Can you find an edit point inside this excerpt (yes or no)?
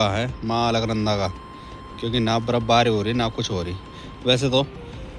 no